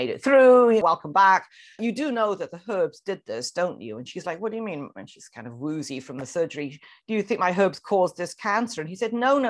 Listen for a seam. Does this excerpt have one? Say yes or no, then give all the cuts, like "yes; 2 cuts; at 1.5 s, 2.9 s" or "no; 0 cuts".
yes; 2 cuts; at 0.8 s, 1.8 s